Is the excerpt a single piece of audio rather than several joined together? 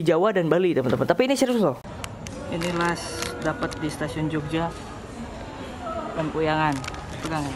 no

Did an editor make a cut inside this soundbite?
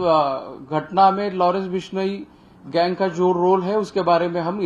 no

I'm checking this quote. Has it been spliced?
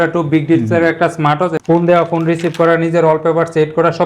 yes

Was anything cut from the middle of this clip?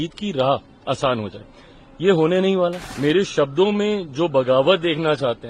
yes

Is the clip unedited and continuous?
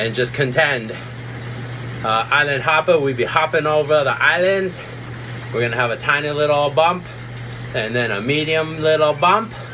yes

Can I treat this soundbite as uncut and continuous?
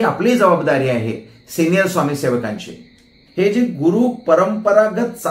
no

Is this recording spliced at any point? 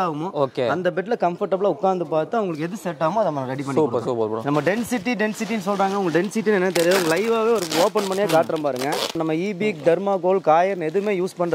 yes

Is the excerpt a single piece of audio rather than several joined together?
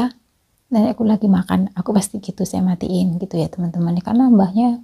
yes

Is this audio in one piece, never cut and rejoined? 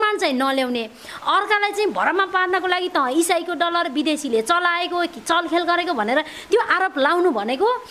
yes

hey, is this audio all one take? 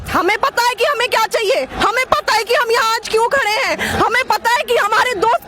yes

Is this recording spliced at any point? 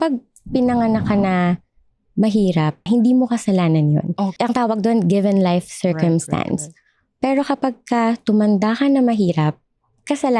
yes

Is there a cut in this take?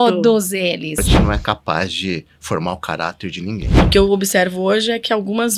yes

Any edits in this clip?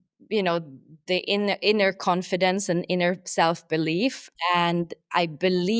yes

